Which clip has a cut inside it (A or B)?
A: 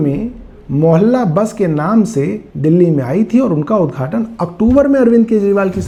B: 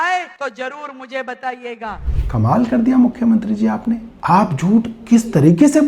B